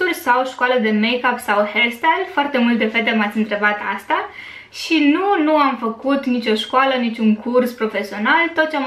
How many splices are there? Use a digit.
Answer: 0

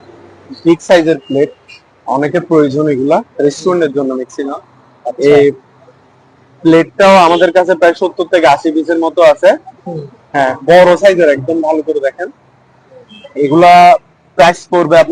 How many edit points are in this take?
0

